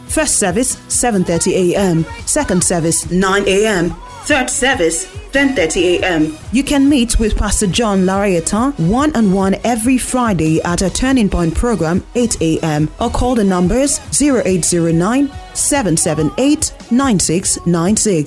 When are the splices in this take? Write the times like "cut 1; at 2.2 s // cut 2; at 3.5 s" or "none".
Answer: cut 1; at 6.4 s